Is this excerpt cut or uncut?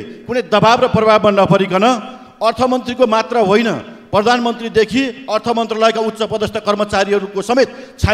uncut